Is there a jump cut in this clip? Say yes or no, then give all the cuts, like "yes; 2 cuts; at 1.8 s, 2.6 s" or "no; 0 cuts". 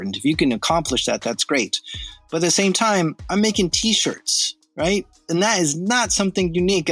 no; 0 cuts